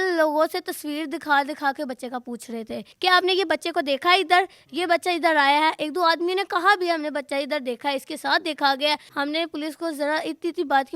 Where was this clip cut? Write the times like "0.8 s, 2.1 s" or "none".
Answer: 2.9 s, 9.1 s

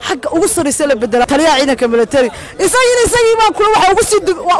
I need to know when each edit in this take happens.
1.2 s

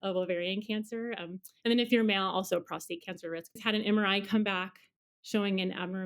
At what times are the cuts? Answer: 3.6 s

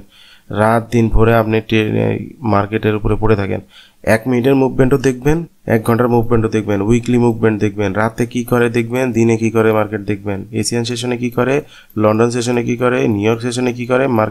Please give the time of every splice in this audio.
none

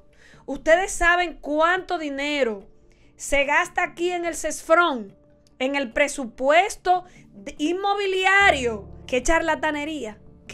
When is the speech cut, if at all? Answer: 8.9 s

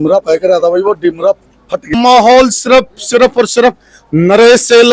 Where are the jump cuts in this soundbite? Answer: 1.9 s

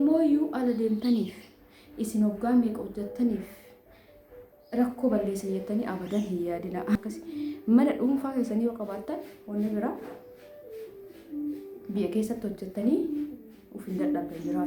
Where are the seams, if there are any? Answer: 7.0 s

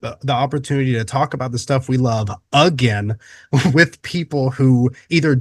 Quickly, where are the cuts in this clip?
none

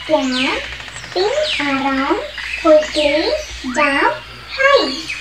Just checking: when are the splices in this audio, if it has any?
none

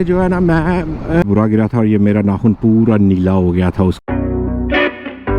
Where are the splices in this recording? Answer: 1.2 s, 4.0 s

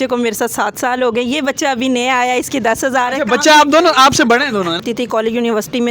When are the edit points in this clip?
4.8 s

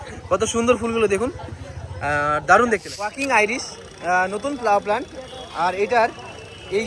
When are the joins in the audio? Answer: 3.2 s

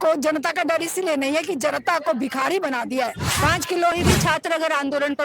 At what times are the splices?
3.9 s

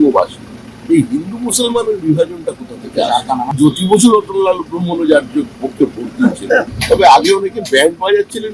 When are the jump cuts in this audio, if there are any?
3.6 s, 6.7 s

